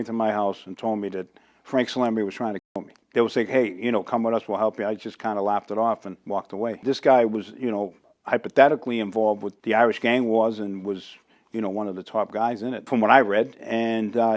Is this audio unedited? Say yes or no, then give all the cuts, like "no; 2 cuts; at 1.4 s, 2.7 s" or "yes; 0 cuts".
no; 3 cuts; at 6.8 s, 9.5 s, 12.8 s